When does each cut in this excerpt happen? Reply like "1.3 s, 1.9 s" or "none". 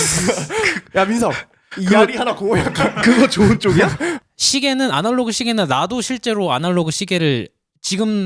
4.2 s